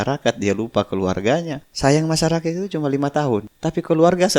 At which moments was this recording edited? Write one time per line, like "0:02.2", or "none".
0:01.6
0:03.5